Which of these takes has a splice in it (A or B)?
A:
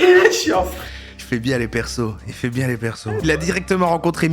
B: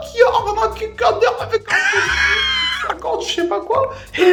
A